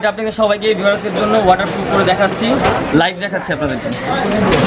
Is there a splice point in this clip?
no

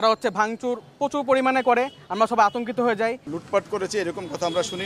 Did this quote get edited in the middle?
yes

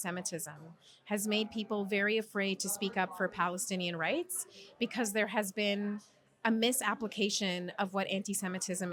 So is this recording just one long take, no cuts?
yes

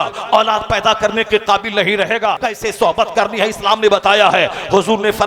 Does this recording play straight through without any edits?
no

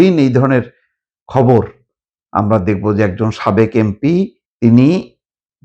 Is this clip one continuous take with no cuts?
no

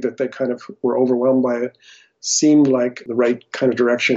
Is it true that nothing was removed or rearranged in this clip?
no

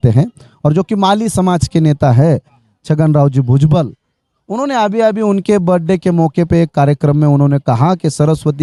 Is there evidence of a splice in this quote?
no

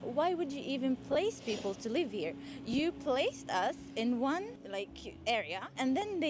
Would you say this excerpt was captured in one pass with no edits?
yes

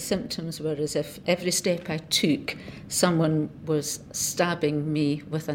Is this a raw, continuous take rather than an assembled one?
no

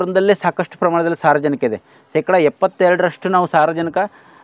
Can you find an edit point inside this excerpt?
no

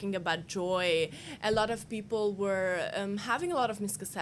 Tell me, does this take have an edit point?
no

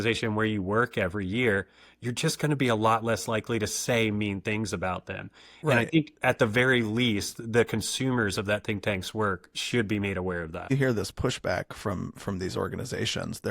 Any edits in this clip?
yes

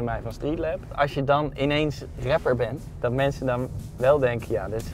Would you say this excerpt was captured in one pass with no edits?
no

